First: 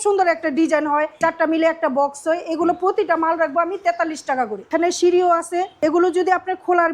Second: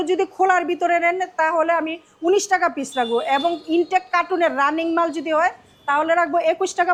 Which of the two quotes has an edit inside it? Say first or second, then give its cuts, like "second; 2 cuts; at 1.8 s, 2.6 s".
first; 3 cuts; at 1.1 s, 4.7 s, 5.7 s